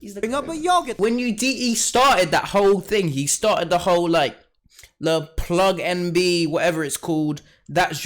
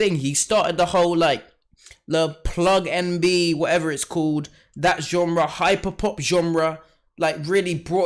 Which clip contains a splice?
first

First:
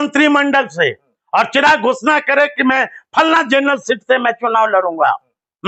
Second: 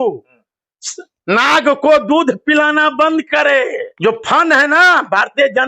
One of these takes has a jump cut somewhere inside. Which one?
second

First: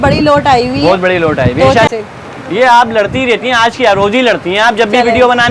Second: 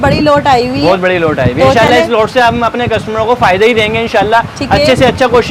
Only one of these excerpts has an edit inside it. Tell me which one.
first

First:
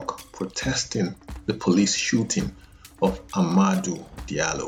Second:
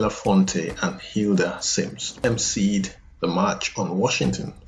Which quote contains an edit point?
second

